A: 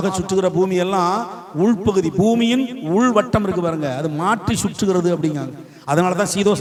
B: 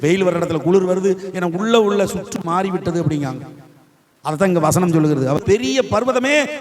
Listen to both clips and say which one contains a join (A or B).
B